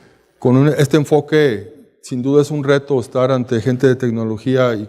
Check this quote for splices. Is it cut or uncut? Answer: cut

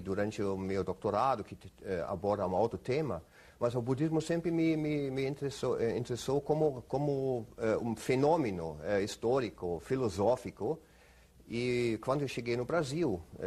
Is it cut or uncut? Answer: uncut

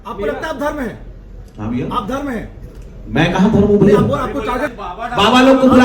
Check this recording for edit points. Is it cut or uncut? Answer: cut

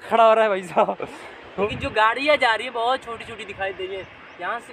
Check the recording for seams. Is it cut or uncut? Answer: cut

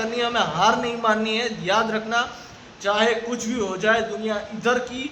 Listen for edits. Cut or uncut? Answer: uncut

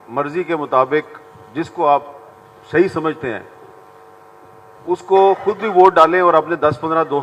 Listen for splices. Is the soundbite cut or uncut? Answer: uncut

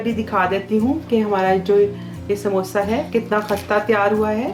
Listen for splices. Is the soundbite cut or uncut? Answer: uncut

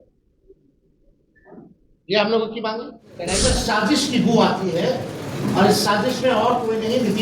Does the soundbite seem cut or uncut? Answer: cut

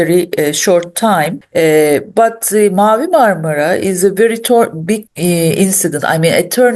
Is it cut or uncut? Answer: cut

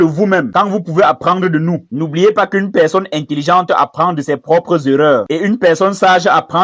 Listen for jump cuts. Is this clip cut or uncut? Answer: uncut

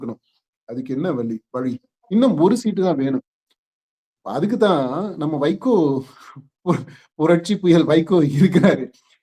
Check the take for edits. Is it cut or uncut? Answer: cut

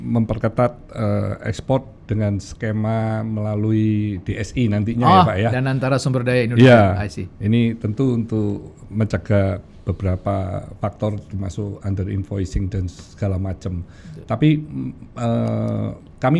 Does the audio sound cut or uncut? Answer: uncut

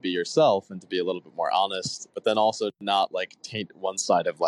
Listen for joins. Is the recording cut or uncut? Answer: cut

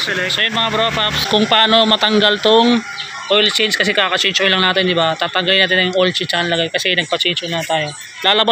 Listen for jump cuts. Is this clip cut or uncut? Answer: cut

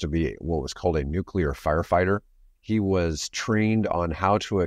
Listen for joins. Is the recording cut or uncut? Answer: uncut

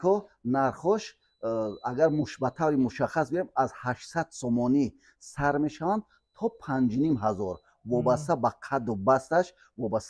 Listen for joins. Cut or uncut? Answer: uncut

